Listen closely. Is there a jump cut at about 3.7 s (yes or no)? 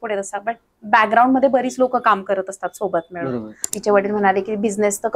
yes